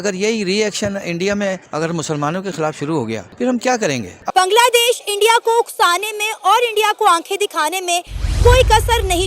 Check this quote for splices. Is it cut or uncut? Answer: cut